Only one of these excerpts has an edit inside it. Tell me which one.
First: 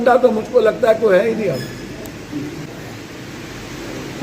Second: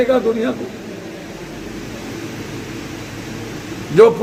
first; 1 cut; at 2.7 s

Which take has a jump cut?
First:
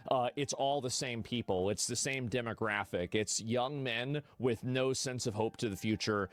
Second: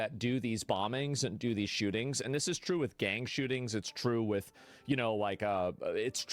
second; 1 cut; at 3.2 s

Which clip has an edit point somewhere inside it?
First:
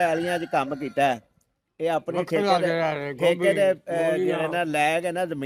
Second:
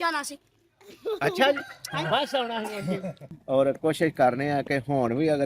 second; 1 cut; at 3.3 s

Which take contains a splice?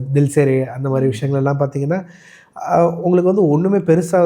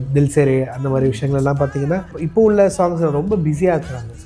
second; 1 cut; at 2.2 s

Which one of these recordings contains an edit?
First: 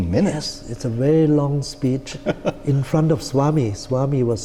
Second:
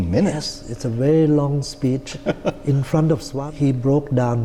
second; 1 cut; at 3.3 s

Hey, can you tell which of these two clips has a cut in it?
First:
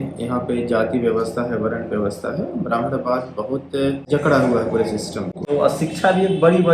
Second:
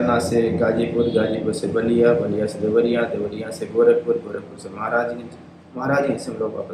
first; 2 cuts; at 4.0 s, 5.4 s

